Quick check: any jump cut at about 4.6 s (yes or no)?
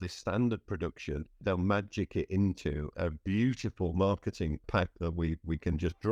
yes